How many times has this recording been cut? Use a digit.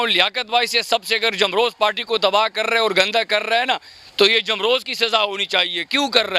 0